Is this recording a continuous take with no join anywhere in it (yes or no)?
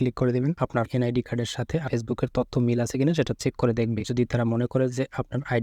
no